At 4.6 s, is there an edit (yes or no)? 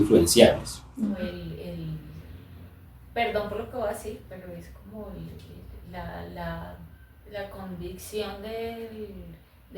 no